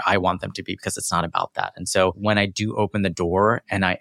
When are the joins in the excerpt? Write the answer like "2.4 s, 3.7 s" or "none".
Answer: 2.2 s